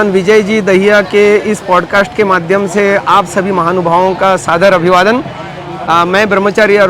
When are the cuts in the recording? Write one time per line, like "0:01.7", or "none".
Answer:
none